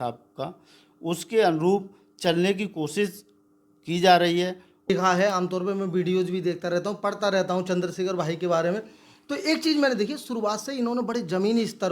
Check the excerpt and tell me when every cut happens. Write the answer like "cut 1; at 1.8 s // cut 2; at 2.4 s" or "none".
cut 1; at 4.9 s